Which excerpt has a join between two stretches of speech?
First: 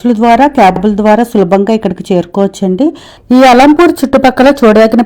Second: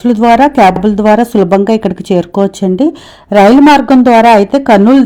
first; 1 cut; at 3.1 s

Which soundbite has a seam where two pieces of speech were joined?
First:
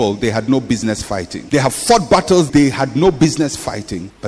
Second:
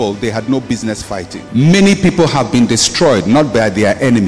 second; 1 cut; at 1.4 s

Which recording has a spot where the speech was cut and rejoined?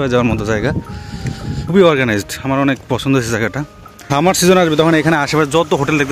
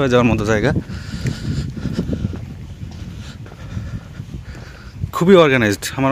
first; 2 cuts; at 1.7 s, 4.1 s

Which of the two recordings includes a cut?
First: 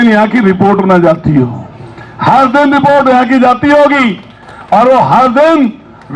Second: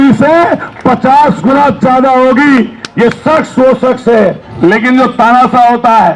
second; 1 cut; at 4.5 s

